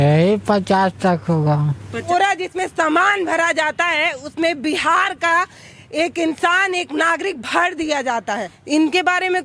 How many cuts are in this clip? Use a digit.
2